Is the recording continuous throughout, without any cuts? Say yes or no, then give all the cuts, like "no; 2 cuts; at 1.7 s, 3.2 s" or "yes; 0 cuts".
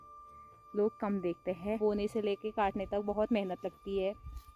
no; 1 cut; at 1.8 s